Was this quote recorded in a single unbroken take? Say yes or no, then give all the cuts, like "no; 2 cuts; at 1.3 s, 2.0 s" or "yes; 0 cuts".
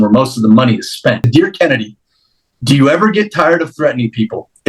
no; 1 cut; at 1.3 s